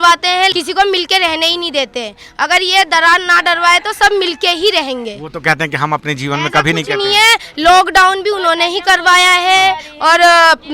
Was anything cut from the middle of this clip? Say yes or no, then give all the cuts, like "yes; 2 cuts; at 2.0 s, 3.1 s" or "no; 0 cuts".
no; 0 cuts